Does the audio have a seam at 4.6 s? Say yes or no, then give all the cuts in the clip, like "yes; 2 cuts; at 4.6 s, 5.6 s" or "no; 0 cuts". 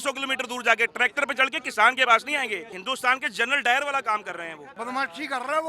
yes; 2 cuts; at 2.7 s, 4.6 s